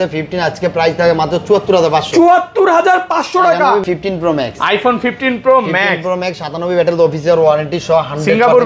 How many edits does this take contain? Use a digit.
1